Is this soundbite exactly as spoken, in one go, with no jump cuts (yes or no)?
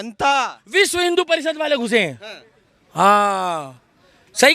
yes